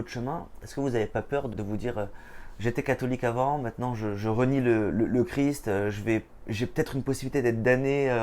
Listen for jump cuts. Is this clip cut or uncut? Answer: cut